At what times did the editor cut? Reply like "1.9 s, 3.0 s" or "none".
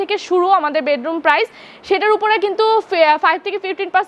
none